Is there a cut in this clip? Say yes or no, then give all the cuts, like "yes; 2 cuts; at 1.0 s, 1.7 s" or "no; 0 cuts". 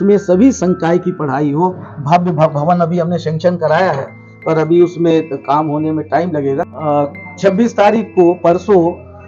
yes; 1 cut; at 6.7 s